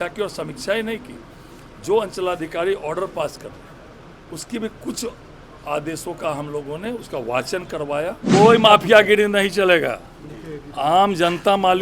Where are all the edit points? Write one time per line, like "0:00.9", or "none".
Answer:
0:08.2